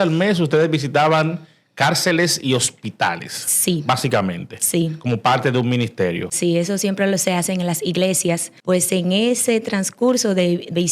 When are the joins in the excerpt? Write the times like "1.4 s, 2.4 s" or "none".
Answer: 6.3 s, 8.5 s